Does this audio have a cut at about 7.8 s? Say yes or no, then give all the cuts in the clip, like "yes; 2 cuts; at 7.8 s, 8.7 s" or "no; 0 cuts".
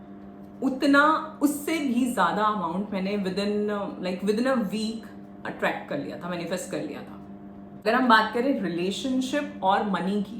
yes; 1 cut; at 7.8 s